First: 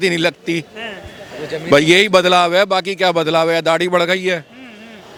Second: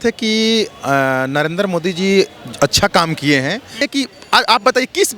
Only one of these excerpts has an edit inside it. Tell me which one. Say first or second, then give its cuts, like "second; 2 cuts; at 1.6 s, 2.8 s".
second; 1 cut; at 3.8 s